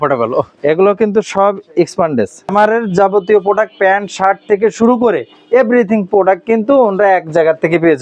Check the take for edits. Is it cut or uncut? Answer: cut